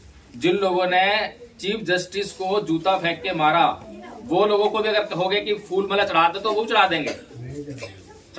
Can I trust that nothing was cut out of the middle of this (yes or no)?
yes